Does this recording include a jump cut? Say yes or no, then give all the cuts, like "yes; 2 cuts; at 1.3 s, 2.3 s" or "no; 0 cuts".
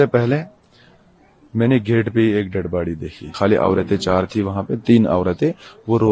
yes; 1 cut; at 3.2 s